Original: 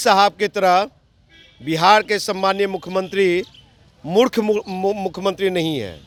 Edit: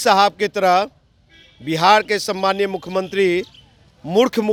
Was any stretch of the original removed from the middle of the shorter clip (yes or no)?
no